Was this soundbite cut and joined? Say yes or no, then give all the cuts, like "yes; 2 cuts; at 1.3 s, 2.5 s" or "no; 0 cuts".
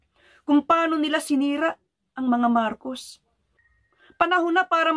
yes; 1 cut; at 3.1 s